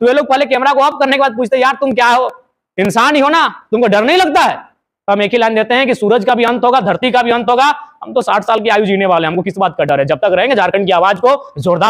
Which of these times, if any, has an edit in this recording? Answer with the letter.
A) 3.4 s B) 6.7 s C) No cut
C